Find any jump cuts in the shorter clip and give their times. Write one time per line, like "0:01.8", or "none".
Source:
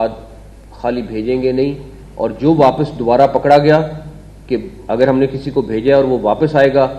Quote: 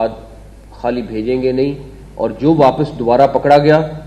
none